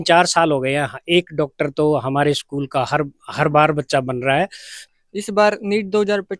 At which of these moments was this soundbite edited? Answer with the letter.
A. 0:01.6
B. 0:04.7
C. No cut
B